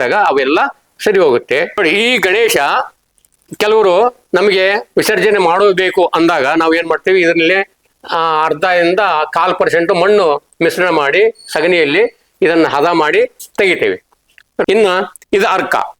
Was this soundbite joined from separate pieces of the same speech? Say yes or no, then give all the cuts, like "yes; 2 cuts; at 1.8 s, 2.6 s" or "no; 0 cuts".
yes; 2 cuts; at 1.8 s, 14.6 s